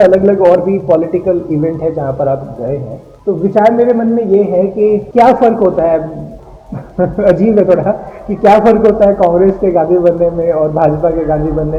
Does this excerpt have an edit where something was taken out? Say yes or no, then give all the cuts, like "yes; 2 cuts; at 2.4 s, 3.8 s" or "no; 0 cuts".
no; 0 cuts